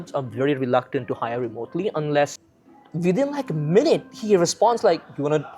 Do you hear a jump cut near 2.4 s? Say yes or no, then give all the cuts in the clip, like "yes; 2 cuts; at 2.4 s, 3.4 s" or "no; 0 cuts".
yes; 1 cut; at 2.4 s